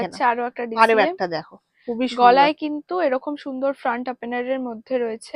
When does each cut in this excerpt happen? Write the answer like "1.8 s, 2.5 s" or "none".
none